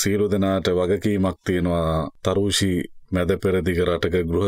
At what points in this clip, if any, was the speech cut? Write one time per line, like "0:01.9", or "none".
0:02.1